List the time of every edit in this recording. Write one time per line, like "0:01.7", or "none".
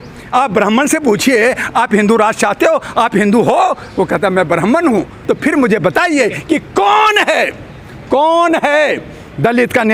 0:05.2